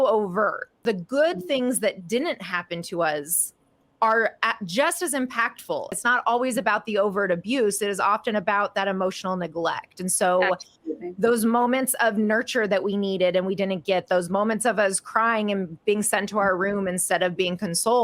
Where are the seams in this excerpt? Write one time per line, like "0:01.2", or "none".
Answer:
0:00.8
0:06.0